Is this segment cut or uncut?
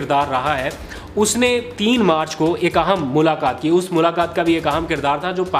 uncut